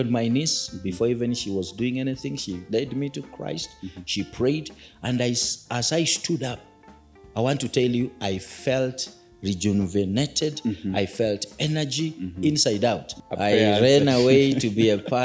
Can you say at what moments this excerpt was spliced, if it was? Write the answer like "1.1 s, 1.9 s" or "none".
13.2 s